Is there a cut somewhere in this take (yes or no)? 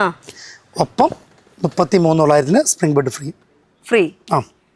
no